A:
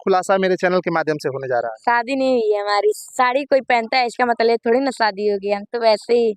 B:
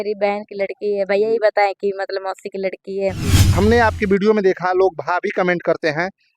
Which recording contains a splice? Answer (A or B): B